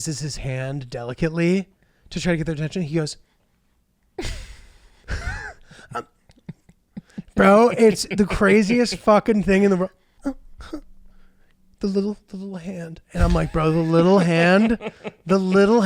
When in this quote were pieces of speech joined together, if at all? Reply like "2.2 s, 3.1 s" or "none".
10.1 s

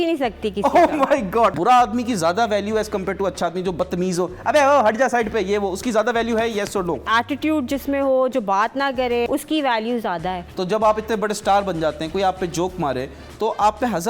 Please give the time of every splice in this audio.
1.5 s, 7.0 s, 9.3 s, 10.5 s

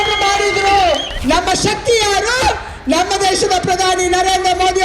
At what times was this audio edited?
1.1 s

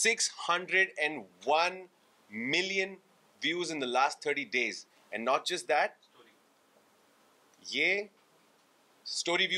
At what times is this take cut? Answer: none

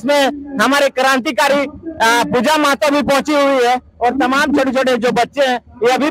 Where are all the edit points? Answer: none

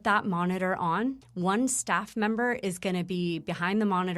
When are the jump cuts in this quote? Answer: 1.2 s

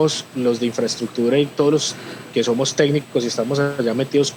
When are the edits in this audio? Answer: none

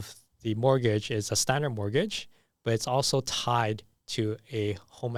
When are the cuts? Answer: none

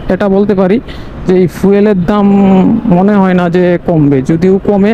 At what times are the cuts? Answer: none

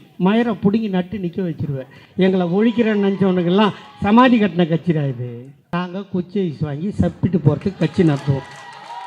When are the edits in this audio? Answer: 5.5 s

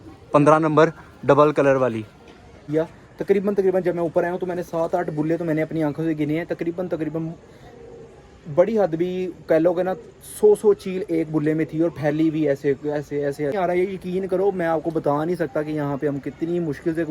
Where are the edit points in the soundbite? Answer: 2.6 s, 13.5 s

